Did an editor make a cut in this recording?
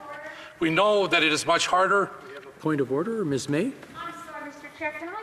no; 0 cuts

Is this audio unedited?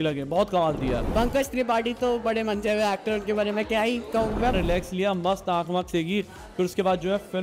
no; 2 cuts; at 1.0 s, 4.5 s

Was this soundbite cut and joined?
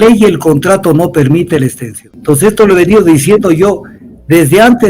yes; 1 cut; at 2.1 s

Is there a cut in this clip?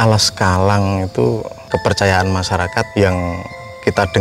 yes; 2 cuts; at 1.5 s, 2.9 s

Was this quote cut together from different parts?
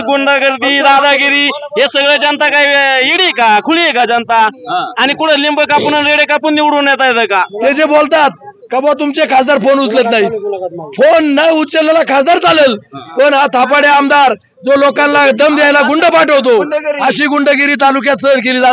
yes; 1 cut; at 7.5 s

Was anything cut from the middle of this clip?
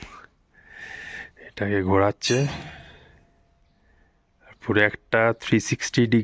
no; 0 cuts

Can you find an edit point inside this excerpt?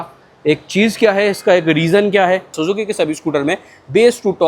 yes; 1 cut; at 2.5 s

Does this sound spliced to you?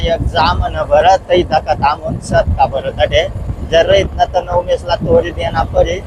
no; 0 cuts

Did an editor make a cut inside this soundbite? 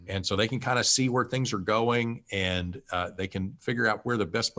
no; 0 cuts

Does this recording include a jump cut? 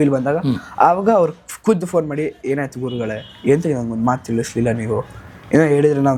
no; 0 cuts

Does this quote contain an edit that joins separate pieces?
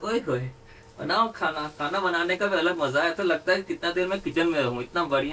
no; 0 cuts

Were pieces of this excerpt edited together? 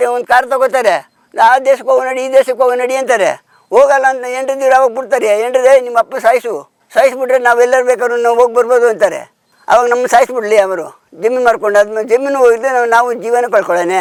no; 0 cuts

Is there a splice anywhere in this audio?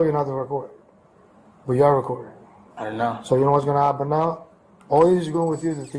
no; 0 cuts

